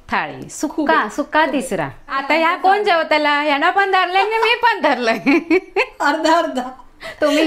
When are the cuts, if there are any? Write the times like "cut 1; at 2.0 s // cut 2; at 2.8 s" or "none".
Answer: cut 1; at 2.2 s